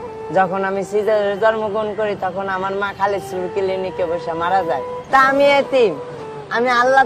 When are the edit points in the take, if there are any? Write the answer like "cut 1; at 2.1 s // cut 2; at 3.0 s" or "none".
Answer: cut 1; at 4.9 s